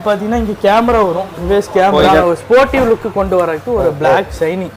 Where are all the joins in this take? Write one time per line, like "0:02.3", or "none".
0:02.2